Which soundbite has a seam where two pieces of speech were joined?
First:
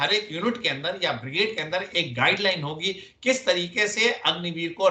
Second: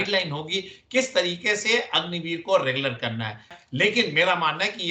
second; 1 cut; at 3.5 s

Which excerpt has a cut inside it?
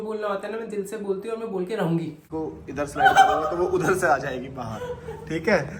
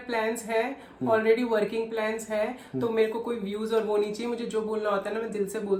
first; 1 cut; at 2.2 s

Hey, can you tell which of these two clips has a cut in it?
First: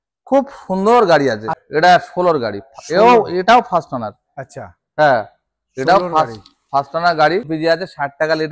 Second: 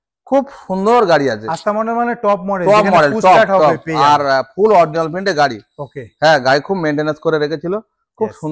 first; 2 cuts; at 1.5 s, 7.5 s

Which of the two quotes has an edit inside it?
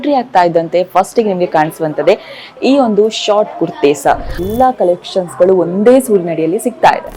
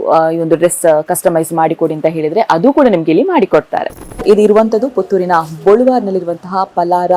second; 1 cut; at 4.0 s

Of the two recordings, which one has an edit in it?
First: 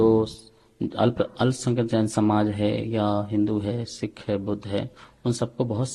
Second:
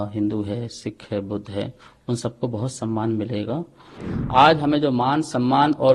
second; 1 cut; at 4.0 s

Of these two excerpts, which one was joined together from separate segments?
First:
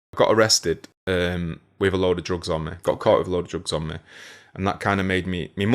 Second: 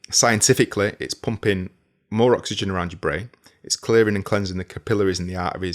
first; 1 cut; at 0.9 s

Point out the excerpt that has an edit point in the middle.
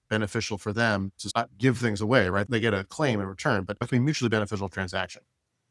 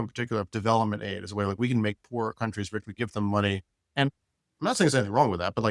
first; 3 cuts; at 1.2 s, 2.4 s, 3.9 s

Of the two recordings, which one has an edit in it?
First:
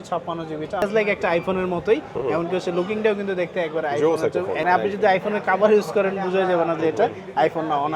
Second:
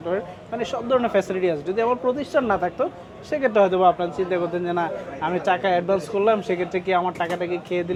first; 2 cuts; at 0.8 s, 4.6 s

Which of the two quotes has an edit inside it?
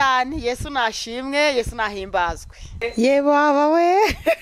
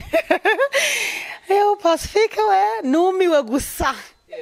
first; 1 cut; at 2.8 s

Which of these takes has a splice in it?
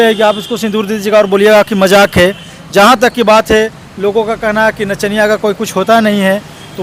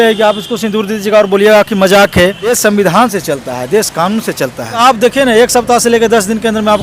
second; 2 cuts; at 2.6 s, 4.8 s

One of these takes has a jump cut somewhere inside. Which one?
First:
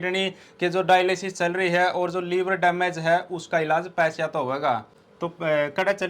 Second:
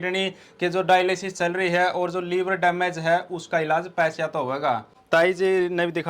second; 1 cut; at 4.9 s

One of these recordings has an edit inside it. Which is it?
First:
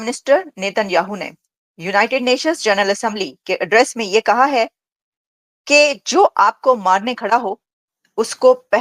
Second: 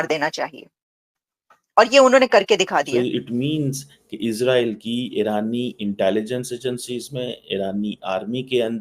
second; 1 cut; at 2.9 s

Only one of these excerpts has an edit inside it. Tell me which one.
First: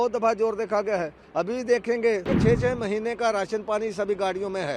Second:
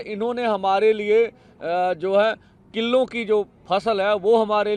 first; 1 cut; at 2.3 s

